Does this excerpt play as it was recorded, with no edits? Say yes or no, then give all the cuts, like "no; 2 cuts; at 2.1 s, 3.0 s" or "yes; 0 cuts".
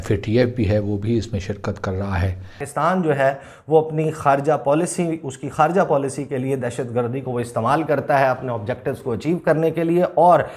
no; 1 cut; at 2.6 s